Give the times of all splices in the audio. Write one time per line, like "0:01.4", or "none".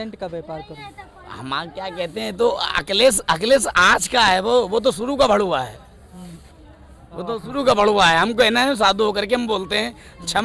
none